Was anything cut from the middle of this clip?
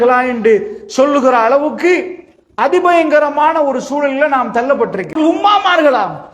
yes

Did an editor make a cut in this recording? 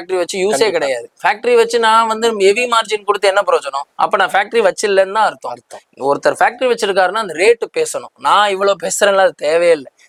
no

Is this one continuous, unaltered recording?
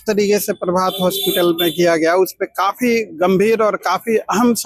yes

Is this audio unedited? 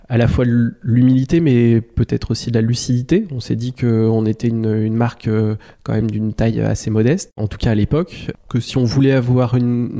yes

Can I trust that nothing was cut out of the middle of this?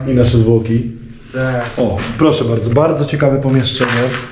no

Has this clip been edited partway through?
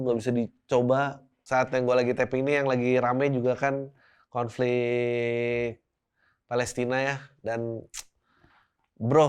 yes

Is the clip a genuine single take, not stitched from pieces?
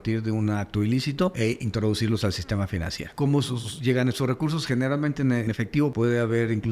no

